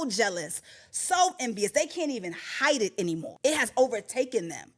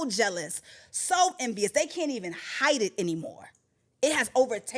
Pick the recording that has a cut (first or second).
first